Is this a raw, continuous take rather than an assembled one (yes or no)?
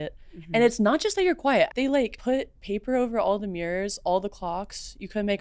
no